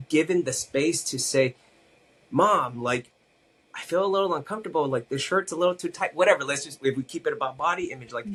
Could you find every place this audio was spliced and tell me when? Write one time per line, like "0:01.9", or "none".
none